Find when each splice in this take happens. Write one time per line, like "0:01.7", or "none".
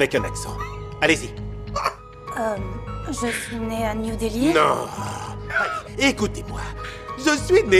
none